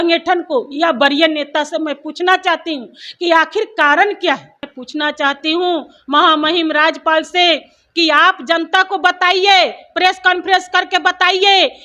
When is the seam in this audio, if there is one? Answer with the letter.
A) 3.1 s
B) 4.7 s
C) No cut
B